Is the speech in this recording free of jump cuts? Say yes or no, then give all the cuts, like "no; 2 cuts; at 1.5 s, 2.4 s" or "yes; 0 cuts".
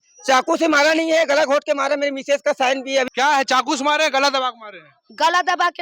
no; 1 cut; at 3.1 s